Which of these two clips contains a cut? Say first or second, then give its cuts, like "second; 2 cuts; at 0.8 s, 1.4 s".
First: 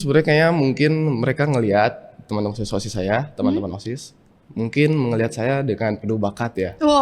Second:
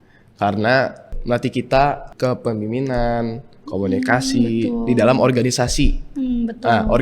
second; 2 cuts; at 1.1 s, 2.1 s